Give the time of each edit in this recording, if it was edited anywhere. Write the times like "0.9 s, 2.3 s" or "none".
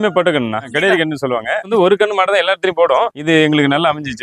1.7 s, 3.2 s